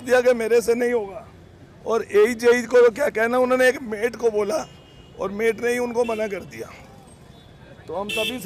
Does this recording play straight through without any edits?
yes; 0 cuts

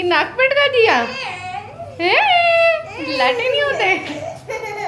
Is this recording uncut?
yes; 0 cuts

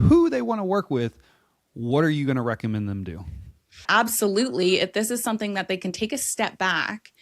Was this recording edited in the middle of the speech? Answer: yes; 1 cut; at 3.9 s

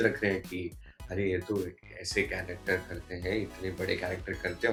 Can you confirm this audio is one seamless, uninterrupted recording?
yes; 0 cuts

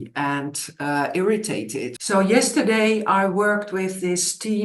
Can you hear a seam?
yes; 1 cut; at 2.0 s

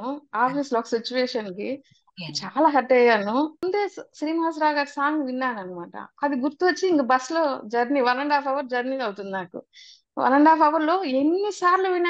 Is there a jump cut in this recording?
yes; 1 cut; at 3.6 s

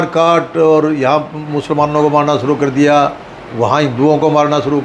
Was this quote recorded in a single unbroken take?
yes; 0 cuts

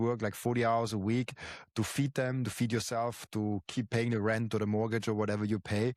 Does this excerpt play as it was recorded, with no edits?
yes; 0 cuts

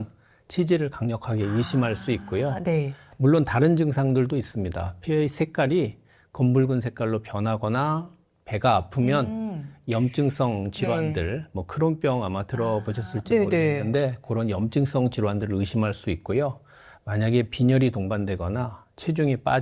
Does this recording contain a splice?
no; 0 cuts

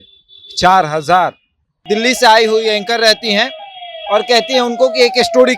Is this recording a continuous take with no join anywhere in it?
no; 1 cut; at 1.8 s

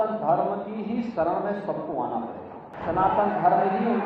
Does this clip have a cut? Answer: yes; 1 cut; at 2.7 s

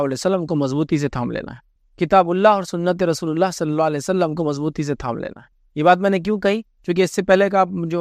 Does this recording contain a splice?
no; 0 cuts

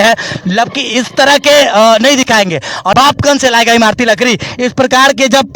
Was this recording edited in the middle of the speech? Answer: yes; 1 cut; at 2.9 s

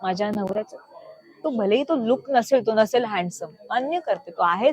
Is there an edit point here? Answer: yes; 1 cut; at 1.5 s

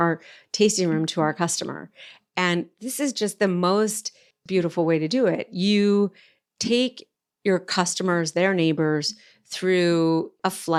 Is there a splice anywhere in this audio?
no; 0 cuts

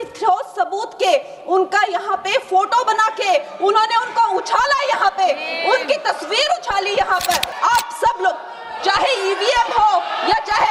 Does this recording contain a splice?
yes; 1 cut; at 7.5 s

